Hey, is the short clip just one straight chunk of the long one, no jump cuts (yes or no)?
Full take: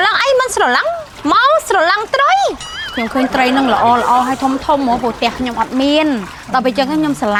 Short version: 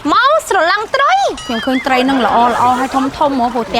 no